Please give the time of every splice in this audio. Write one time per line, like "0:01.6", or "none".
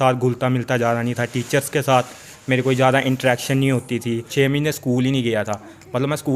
0:04.3